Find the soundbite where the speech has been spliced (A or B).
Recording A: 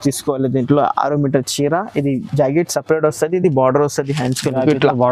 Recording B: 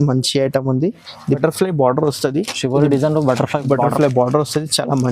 B